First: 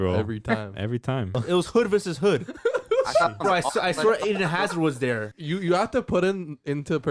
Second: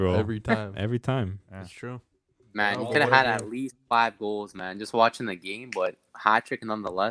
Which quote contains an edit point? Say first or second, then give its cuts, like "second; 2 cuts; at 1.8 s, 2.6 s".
first; 2 cuts; at 1.4 s, 5.3 s